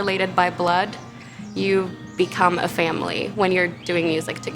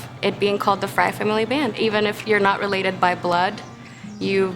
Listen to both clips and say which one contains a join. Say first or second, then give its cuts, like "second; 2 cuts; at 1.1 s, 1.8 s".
second; 1 cut; at 1.7 s